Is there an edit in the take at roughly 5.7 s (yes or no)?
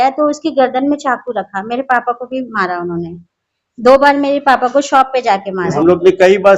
yes